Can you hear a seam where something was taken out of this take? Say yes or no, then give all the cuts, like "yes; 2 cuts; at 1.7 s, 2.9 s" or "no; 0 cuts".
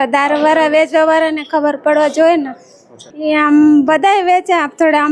yes; 1 cut; at 3.1 s